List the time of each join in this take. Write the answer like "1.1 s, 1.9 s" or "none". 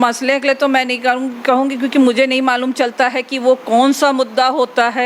none